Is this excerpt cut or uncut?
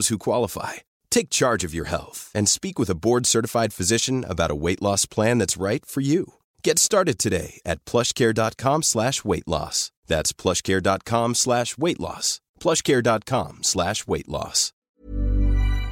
cut